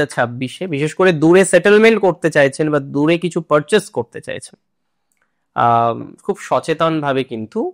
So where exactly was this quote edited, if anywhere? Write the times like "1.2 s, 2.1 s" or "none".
none